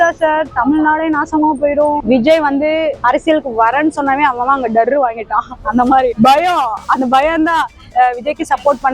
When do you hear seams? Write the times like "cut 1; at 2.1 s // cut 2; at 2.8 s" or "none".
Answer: cut 1; at 2.0 s // cut 2; at 7.8 s